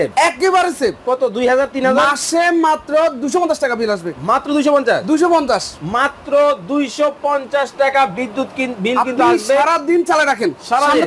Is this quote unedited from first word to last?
yes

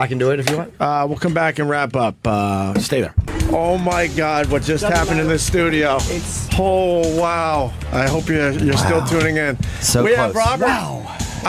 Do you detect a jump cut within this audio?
no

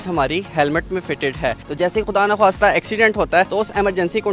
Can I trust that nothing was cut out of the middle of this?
no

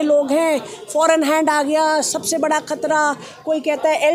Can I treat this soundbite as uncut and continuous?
yes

